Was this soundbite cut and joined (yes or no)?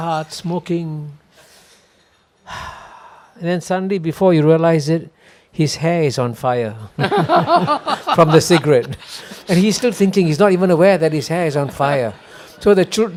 no